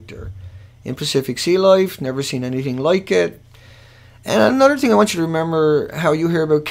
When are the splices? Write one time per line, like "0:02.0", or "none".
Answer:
0:04.7

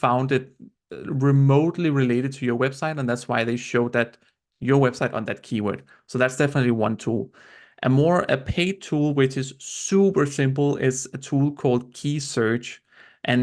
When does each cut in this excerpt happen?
none

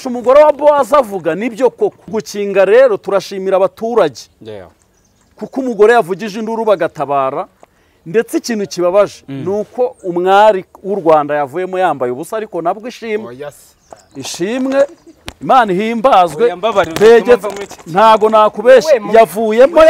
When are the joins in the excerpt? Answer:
0:02.1

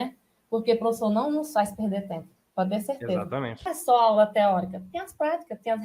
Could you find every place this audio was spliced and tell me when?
0:03.7

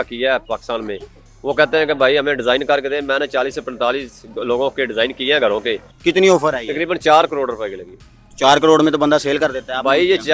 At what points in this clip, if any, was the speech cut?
0:05.9

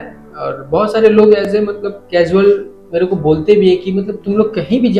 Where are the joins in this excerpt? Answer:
none

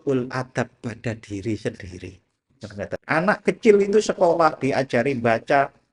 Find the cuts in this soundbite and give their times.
0:03.0

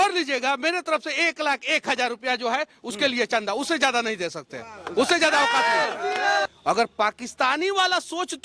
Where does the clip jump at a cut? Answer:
0:06.5

